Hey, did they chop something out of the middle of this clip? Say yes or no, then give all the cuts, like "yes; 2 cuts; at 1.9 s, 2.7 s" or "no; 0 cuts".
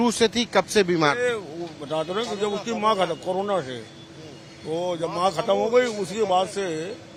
no; 0 cuts